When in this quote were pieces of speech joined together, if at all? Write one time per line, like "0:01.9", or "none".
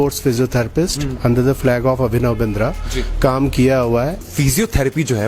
0:04.3